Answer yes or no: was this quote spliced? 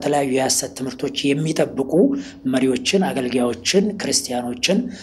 no